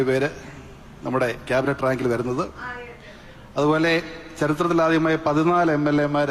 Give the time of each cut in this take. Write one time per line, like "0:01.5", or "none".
none